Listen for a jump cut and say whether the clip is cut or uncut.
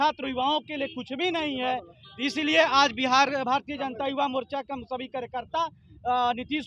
uncut